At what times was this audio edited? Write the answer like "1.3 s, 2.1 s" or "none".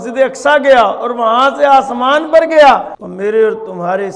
3.0 s